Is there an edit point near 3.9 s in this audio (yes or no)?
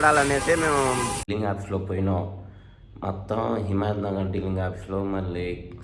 no